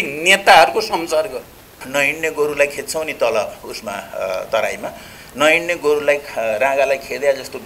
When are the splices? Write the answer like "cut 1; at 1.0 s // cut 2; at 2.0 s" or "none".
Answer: cut 1; at 1.8 s